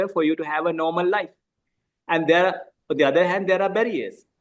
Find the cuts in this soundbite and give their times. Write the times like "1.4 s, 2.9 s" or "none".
none